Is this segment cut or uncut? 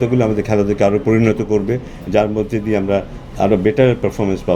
uncut